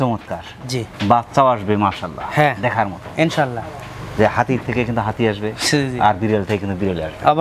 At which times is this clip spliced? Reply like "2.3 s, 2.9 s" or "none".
none

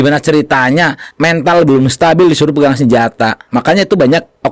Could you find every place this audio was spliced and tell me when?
3.4 s

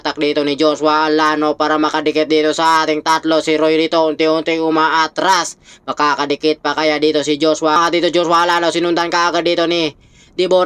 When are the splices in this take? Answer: 7.8 s

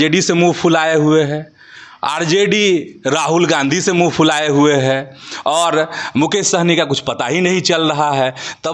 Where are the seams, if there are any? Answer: none

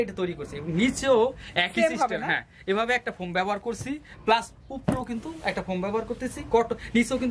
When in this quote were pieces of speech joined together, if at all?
none

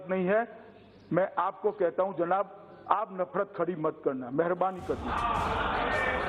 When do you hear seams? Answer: none

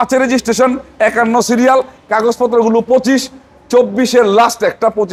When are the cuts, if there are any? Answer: none

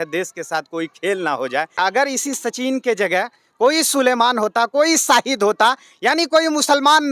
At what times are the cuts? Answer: 1.7 s

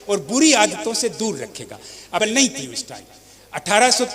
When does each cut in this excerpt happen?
2.2 s

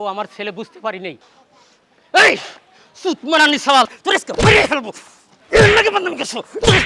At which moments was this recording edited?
4.0 s

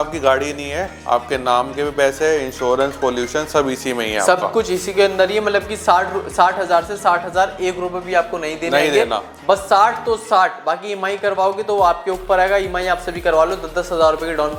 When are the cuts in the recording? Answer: none

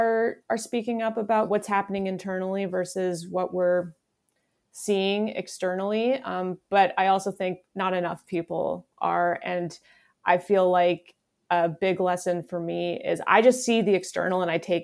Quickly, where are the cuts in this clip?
1.5 s

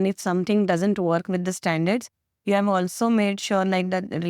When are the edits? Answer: none

